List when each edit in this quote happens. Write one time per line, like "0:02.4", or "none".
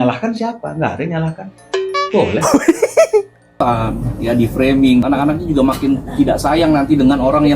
0:03.6
0:05.0